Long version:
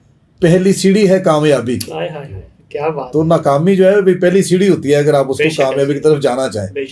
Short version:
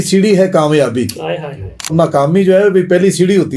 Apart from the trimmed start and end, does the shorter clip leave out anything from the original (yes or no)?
yes